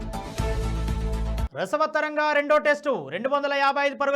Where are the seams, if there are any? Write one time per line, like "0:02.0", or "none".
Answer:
0:01.5